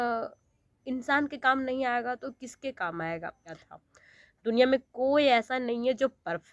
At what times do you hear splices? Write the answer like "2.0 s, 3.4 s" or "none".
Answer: 3.7 s